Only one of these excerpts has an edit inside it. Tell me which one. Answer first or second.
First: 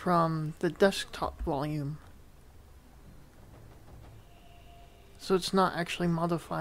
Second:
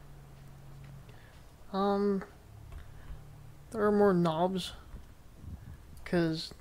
first